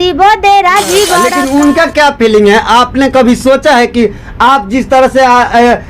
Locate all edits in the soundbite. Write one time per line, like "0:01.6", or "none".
0:01.3